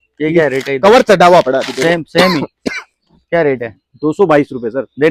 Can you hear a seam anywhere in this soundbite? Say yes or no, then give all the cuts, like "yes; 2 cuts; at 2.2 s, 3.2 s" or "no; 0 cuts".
no; 0 cuts